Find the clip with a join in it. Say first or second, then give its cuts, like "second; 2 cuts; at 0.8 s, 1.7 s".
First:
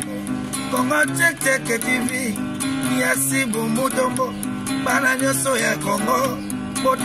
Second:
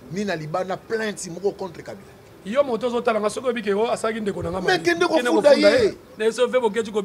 second; 1 cut; at 6.1 s